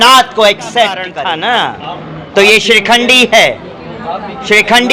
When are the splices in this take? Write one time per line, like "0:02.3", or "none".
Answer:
0:01.1

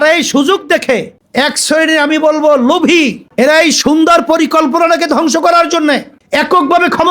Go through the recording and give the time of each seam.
0:06.1

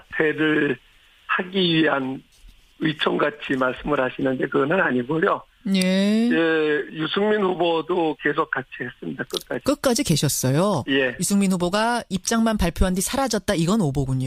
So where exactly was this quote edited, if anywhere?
none

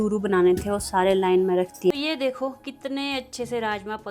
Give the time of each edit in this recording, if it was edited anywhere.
0:01.9

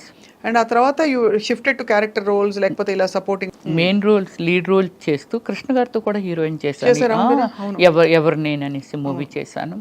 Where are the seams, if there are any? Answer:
0:03.5

